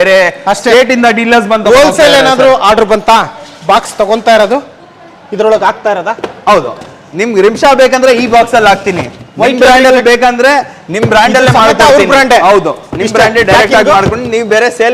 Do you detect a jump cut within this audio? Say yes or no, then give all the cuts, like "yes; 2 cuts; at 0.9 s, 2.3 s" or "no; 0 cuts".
no; 0 cuts